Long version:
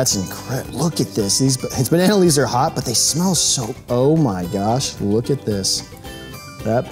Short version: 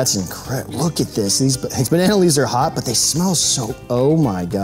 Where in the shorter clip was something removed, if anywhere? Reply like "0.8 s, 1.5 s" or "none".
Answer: none

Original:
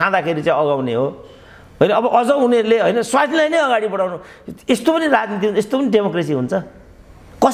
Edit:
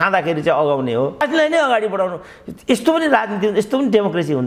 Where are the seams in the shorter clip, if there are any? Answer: 1.2 s

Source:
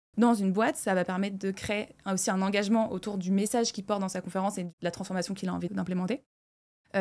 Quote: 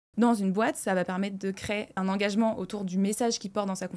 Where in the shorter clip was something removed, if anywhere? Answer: 1.9 s

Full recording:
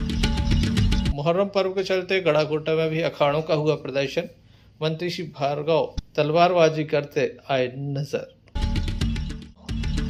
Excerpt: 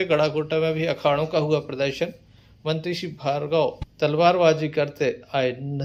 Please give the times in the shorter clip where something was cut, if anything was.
none

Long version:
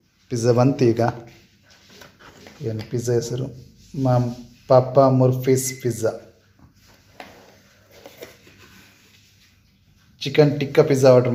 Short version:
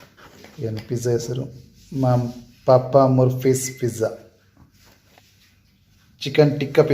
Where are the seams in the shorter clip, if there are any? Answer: 5.0 s

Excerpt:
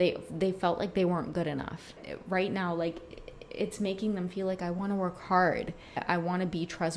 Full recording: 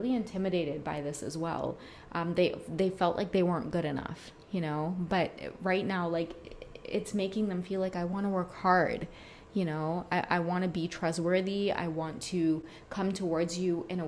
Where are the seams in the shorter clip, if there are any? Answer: 2.0 s, 6.0 s

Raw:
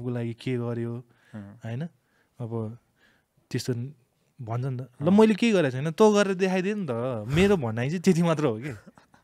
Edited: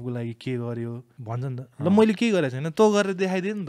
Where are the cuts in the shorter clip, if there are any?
1.1 s

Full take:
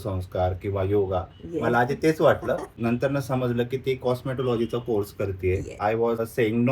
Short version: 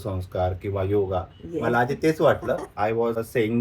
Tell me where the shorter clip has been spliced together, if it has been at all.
2.7 s

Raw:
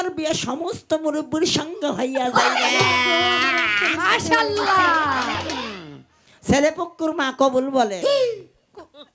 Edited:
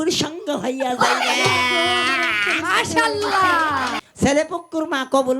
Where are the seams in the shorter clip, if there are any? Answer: 4.0 s

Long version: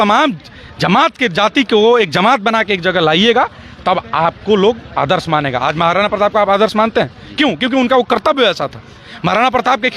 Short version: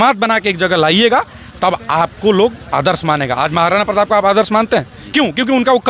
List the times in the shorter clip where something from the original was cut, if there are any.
none

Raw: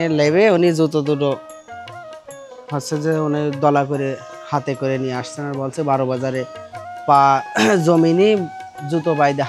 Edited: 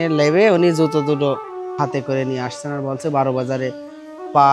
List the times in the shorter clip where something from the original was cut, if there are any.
1.6 s

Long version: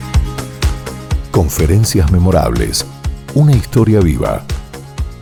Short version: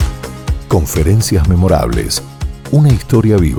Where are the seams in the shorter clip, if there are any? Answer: none

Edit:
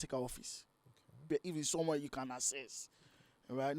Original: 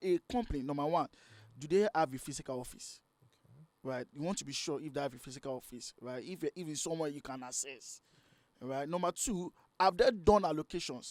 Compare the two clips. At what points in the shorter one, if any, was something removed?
1.2 s

